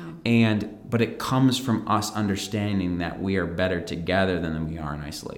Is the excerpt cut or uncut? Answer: uncut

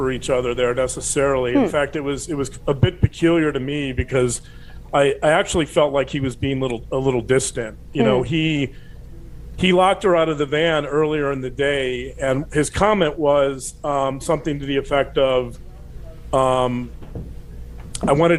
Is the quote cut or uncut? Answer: uncut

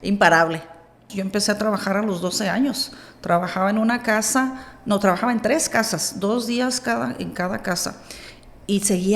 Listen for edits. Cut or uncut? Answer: cut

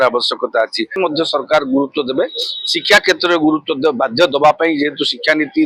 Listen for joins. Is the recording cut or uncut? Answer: cut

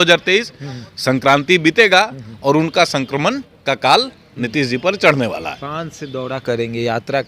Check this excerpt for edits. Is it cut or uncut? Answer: uncut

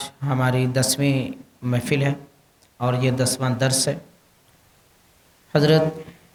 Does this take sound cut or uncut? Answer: uncut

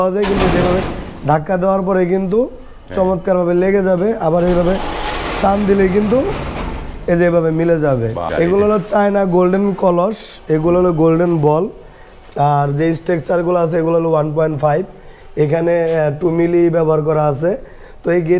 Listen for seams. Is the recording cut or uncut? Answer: cut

